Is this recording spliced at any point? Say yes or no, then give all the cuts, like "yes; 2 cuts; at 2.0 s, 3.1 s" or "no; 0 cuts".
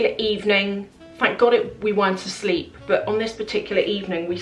no; 0 cuts